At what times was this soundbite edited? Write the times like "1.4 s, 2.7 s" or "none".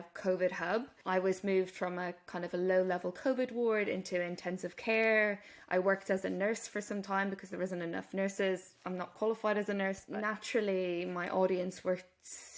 0.9 s, 10.0 s